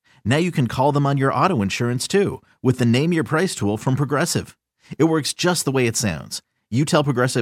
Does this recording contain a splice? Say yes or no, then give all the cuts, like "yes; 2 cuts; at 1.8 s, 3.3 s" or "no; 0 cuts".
no; 0 cuts